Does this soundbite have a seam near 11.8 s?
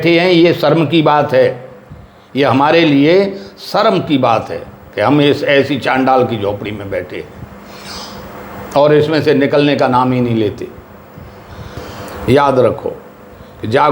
yes; 1 cut; at 11.8 s

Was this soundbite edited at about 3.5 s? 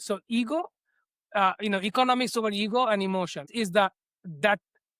yes; 1 cut; at 3.5 s

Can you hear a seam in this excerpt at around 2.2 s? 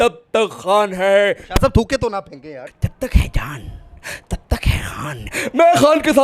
yes; 1 cut; at 2.2 s

